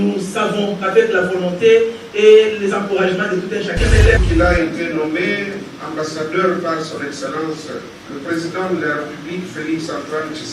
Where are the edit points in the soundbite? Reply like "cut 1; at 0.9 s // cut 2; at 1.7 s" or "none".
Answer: cut 1; at 4.2 s